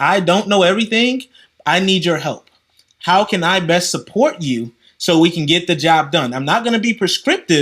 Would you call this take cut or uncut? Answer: uncut